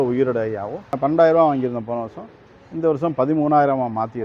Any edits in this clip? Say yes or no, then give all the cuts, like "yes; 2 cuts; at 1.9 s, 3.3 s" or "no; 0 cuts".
yes; 1 cut; at 1.0 s